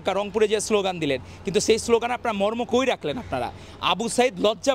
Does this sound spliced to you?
no; 0 cuts

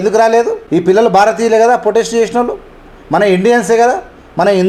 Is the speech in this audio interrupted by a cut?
no; 0 cuts

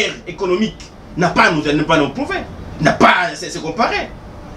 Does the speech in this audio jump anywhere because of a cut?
no; 0 cuts

